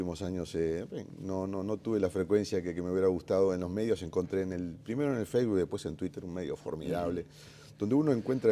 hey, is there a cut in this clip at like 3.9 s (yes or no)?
no